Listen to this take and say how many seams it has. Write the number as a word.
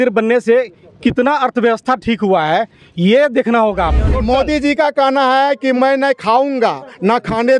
one